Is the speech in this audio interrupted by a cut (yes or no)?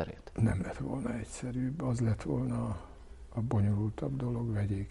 no